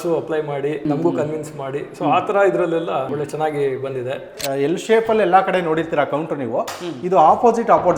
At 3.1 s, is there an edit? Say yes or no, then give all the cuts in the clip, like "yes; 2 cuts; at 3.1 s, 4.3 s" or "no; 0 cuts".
yes; 3 cuts; at 0.9 s, 3.1 s, 4.4 s